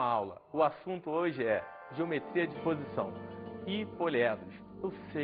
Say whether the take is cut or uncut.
cut